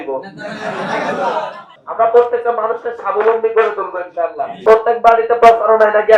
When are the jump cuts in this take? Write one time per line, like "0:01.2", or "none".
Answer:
0:01.7
0:04.6